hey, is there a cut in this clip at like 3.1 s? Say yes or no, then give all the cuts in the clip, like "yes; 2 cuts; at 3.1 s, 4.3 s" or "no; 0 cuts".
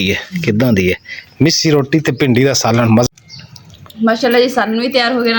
yes; 1 cut; at 3.1 s